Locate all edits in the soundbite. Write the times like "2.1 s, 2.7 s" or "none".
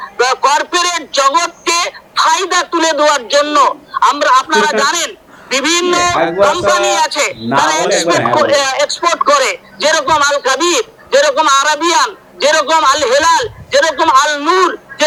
none

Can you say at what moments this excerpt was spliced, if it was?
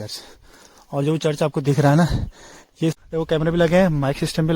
3.0 s

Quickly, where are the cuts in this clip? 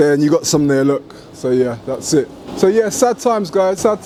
none

